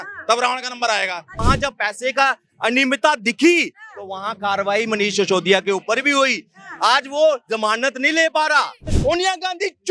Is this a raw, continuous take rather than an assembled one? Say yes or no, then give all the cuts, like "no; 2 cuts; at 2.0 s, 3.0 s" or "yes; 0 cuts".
no; 2 cuts; at 1.4 s, 8.8 s